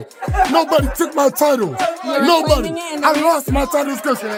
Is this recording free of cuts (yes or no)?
yes